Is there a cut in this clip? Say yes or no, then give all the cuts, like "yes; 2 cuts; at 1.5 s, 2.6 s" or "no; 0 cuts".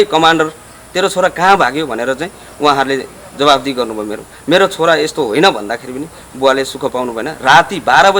no; 0 cuts